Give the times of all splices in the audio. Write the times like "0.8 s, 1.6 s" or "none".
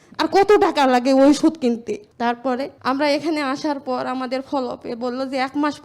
2.7 s